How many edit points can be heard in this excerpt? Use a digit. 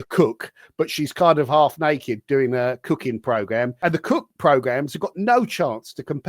1